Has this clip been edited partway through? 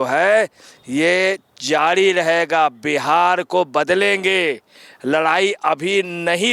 no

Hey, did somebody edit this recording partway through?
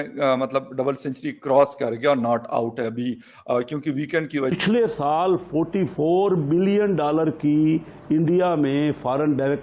yes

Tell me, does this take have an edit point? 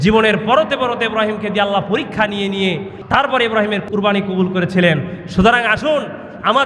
yes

